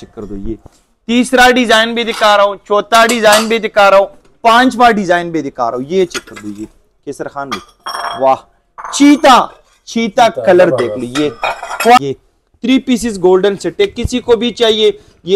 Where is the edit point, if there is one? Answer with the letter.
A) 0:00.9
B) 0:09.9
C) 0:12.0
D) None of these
C